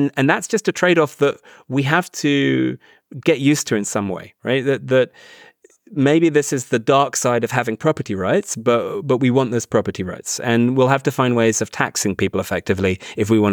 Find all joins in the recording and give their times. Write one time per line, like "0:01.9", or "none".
0:05.9